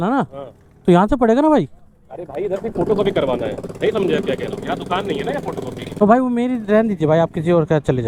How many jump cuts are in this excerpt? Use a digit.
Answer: 0